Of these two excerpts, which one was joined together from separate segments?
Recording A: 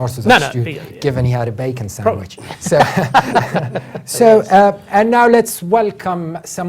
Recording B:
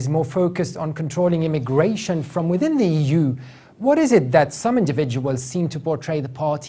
A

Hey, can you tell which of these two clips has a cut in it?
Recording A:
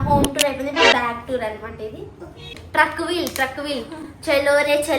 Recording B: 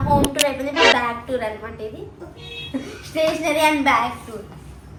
A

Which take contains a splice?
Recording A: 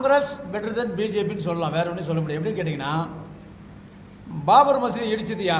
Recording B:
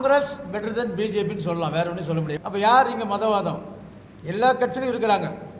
B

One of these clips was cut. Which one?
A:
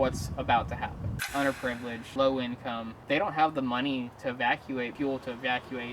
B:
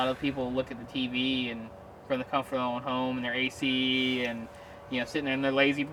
A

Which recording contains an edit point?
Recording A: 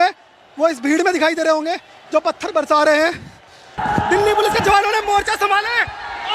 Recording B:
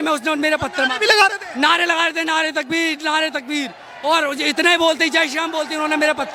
A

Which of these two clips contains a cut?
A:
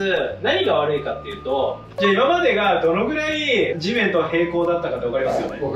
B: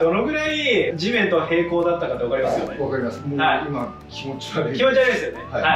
A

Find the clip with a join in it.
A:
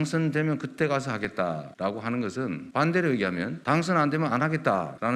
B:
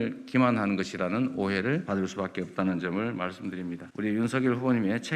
B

